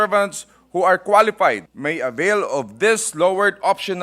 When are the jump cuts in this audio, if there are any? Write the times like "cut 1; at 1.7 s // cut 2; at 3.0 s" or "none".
cut 1; at 1.7 s

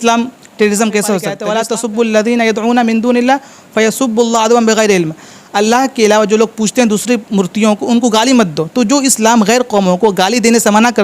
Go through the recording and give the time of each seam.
cut 1; at 1.4 s

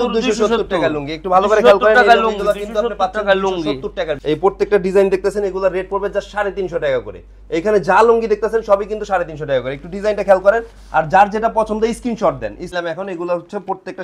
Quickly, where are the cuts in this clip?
cut 1; at 4.2 s // cut 2; at 12.8 s

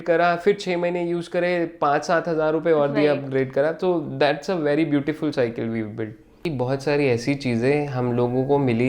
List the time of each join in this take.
cut 1; at 6.4 s

